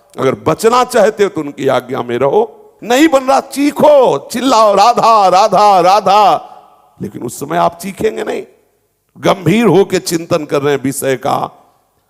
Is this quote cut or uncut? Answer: cut